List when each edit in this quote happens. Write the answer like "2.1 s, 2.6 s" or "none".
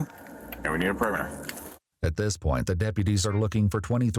none